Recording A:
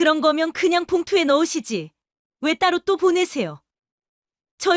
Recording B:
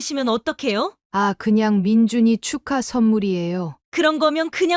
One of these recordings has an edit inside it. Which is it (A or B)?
B